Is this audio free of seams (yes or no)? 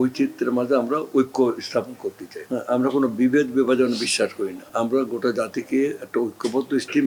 yes